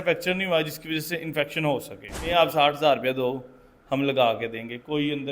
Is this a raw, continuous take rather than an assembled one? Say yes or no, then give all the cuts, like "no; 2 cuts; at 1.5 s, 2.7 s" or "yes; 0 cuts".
no; 1 cut; at 2.3 s